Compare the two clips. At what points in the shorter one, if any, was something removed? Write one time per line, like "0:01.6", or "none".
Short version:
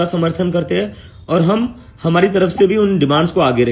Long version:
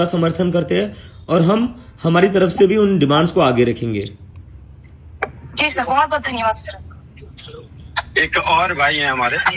none